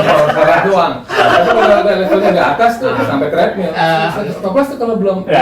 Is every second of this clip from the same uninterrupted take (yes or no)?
no